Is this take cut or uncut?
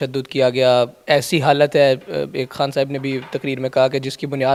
uncut